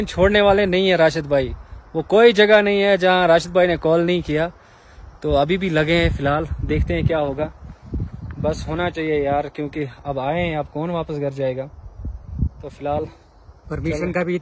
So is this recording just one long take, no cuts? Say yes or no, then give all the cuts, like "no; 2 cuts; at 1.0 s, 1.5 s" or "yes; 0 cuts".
yes; 0 cuts